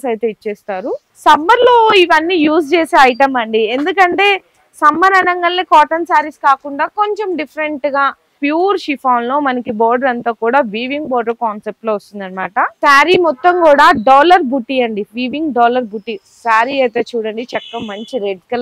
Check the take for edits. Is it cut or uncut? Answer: cut